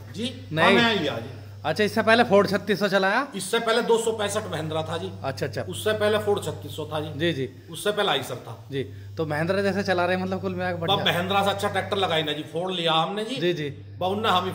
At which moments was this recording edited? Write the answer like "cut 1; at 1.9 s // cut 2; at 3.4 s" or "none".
none